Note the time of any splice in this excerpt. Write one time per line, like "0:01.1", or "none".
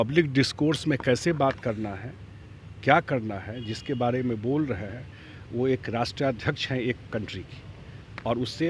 none